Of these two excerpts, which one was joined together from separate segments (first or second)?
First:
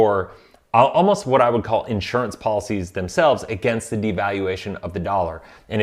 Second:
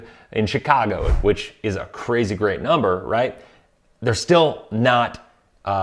second